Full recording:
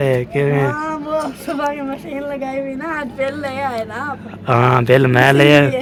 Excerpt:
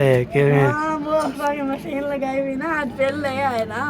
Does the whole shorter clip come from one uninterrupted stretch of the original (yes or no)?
no